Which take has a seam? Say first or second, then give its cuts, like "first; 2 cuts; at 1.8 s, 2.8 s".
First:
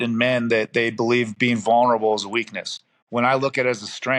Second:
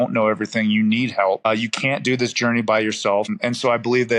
second; 2 cuts; at 1.4 s, 3.3 s